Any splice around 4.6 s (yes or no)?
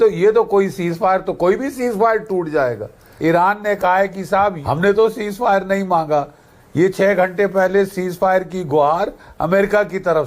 yes